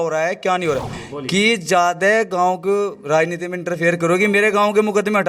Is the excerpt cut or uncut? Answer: cut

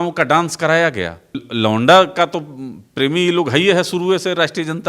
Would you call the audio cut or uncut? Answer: cut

